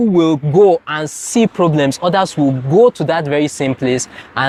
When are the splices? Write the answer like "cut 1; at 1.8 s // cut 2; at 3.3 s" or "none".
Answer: none